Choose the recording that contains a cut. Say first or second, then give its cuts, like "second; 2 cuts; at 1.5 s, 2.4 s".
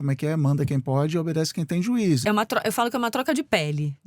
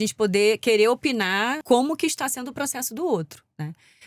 first; 1 cut; at 2.2 s